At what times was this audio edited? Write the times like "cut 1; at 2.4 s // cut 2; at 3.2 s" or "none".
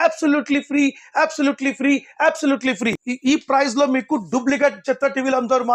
cut 1; at 3.0 s